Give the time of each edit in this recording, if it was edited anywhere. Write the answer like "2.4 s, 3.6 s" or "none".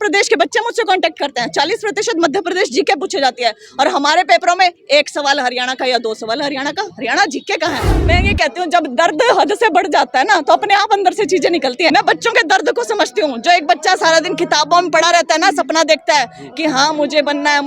8.0 s, 11.9 s